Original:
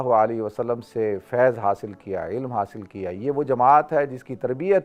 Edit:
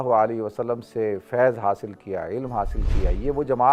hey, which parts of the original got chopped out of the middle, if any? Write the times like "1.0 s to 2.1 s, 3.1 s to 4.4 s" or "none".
none